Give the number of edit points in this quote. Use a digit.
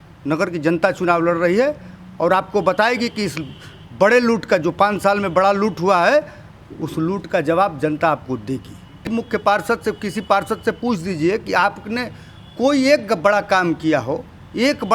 1